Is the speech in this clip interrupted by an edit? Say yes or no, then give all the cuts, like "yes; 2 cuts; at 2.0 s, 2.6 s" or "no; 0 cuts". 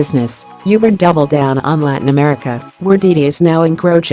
no; 0 cuts